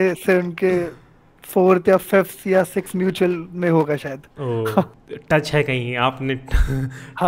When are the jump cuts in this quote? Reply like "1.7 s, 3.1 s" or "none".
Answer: 4.9 s